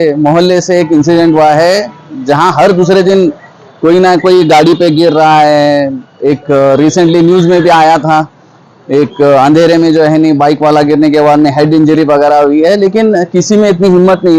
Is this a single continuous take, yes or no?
yes